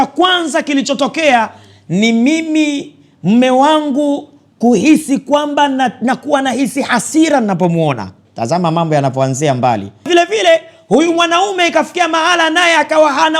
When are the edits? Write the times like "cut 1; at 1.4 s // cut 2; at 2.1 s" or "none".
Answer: cut 1; at 10.1 s